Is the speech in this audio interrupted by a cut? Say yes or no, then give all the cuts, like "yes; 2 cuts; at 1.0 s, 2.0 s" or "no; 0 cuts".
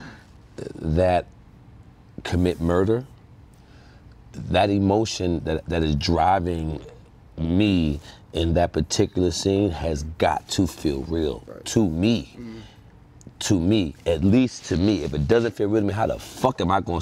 no; 0 cuts